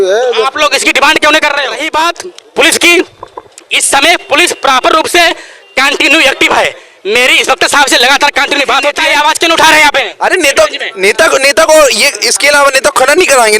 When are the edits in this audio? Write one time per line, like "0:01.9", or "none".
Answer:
0:01.8
0:09.0